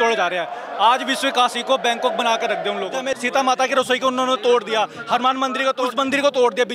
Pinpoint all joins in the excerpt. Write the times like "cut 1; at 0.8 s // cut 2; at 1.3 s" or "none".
cut 1; at 3.0 s // cut 2; at 5.8 s